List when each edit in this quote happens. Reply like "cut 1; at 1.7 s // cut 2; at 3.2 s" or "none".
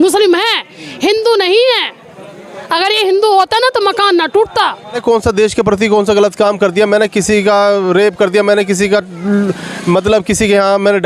cut 1; at 5.0 s